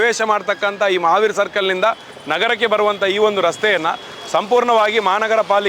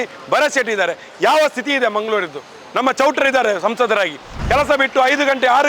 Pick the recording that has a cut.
second; 1 cut; at 4.4 s

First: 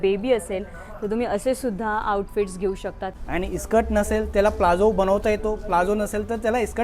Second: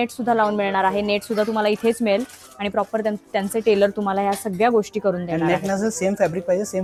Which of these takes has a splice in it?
first; 1 cut; at 3.1 s

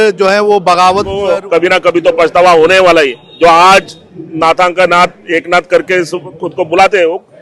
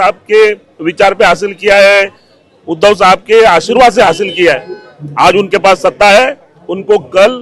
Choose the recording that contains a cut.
first; 1 cut; at 1.2 s

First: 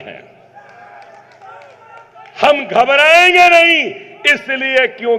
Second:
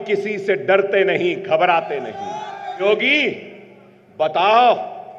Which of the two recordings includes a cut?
second; 1 cut; at 2.8 s

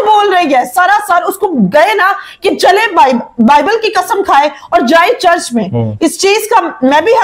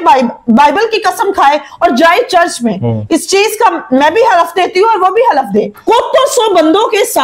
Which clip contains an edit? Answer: second; 1 cut; at 5.8 s

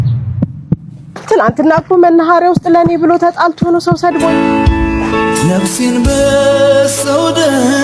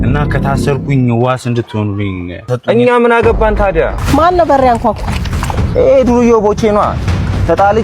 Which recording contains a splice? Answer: second; 1 cut; at 4.0 s

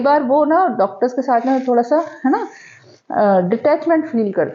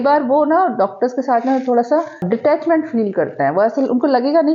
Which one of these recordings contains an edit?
second; 1 cut; at 2.2 s

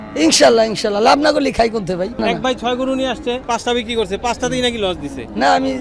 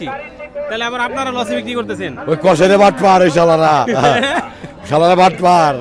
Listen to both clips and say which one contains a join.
first; 2 cuts; at 2.2 s, 3.4 s

